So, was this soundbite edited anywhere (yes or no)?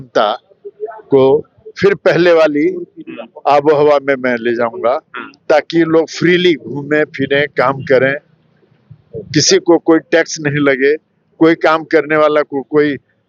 no